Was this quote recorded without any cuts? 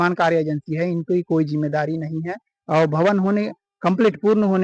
yes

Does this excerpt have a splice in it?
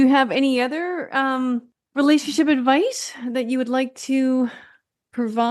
yes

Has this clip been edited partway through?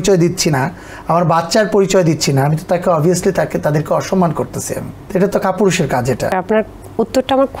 yes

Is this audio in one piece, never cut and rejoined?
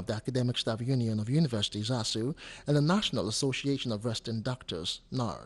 yes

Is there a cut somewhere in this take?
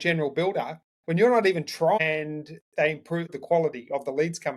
yes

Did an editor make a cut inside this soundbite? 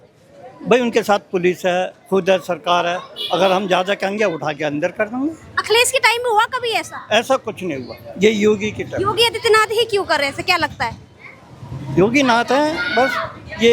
no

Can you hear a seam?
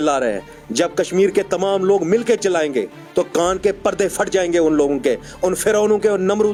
no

